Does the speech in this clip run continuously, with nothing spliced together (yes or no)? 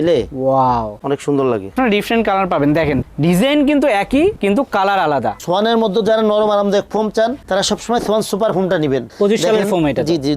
no